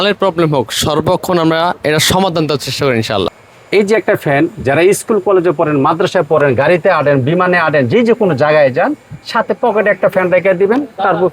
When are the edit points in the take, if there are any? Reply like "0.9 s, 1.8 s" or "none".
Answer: 3.4 s